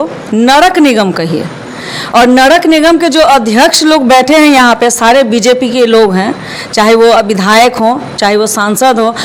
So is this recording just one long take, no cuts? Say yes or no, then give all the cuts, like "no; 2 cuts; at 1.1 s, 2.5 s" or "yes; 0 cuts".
yes; 0 cuts